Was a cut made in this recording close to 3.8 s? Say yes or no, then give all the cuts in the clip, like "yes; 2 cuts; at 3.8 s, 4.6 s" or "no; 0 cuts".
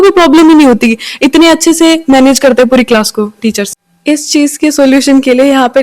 yes; 1 cut; at 3.8 s